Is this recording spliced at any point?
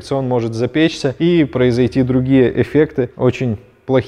no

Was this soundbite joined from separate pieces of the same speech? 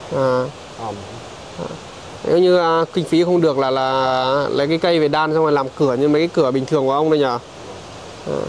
no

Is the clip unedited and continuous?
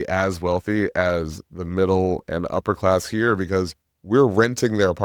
yes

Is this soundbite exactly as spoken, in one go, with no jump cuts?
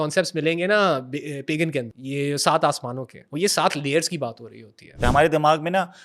no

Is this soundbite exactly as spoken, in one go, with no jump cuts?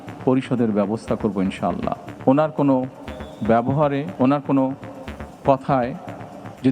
no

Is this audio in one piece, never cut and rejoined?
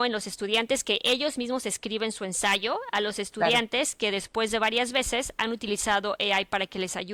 yes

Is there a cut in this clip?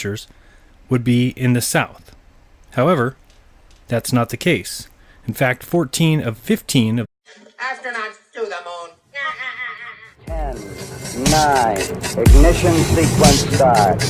no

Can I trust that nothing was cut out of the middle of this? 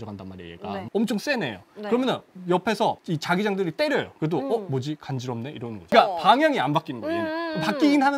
yes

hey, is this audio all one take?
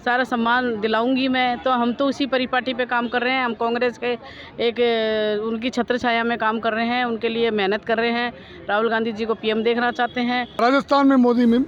no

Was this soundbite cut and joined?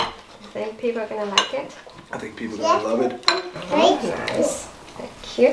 no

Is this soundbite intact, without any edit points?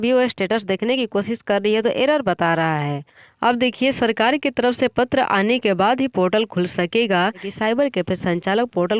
no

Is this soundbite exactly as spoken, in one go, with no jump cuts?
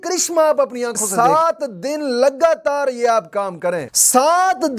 no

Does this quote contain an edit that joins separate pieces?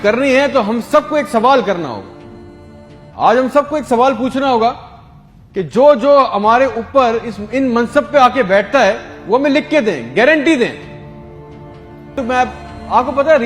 yes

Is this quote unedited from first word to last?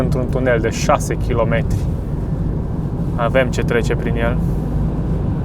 yes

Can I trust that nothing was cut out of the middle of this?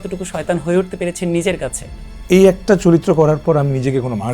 yes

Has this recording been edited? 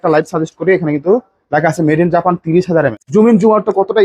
yes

